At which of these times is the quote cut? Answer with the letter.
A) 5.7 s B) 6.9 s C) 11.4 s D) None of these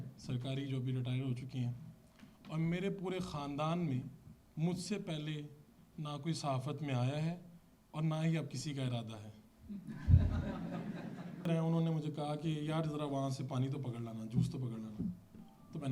C